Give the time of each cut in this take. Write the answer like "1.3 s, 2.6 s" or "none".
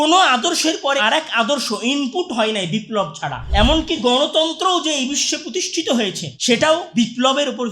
1.0 s, 3.4 s, 6.9 s

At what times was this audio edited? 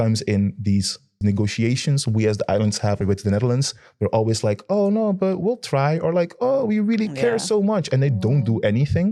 1.2 s, 3.0 s

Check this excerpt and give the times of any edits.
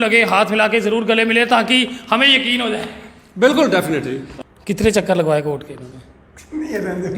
4.2 s

